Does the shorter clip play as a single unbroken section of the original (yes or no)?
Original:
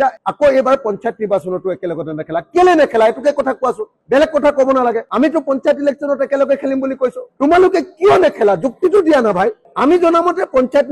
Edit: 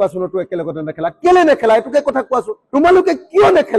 no